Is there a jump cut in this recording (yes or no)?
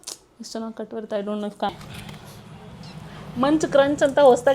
yes